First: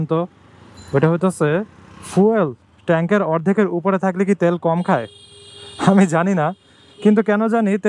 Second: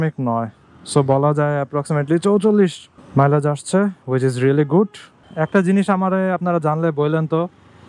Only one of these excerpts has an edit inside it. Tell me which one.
second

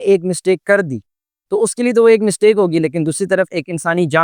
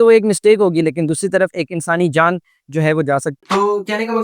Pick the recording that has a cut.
second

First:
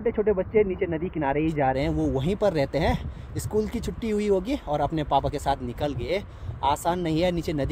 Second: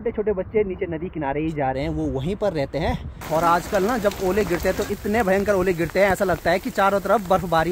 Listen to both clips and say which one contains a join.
second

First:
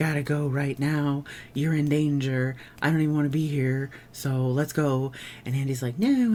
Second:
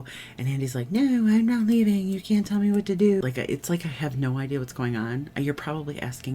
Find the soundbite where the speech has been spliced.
second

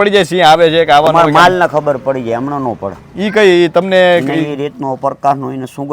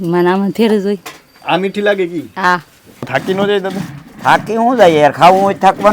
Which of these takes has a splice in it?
second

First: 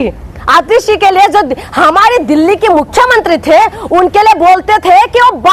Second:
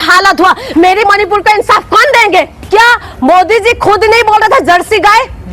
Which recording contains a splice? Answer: second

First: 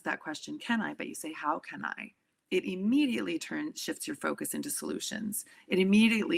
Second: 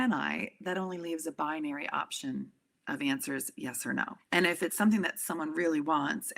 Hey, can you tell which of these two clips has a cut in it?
second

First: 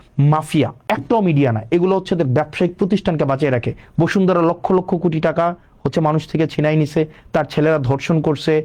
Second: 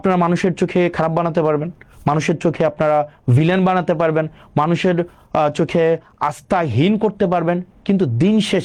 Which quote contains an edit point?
first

